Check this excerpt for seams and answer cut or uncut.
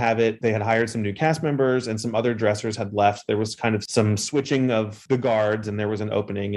uncut